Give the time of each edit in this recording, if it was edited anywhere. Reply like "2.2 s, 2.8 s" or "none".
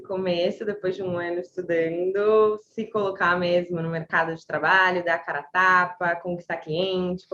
none